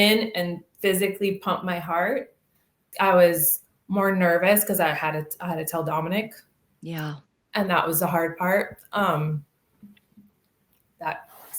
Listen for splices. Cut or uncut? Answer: cut